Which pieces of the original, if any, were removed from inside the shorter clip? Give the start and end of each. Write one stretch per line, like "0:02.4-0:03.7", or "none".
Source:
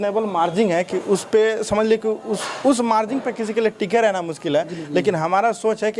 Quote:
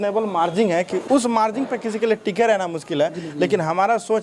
0:01.0-0:02.5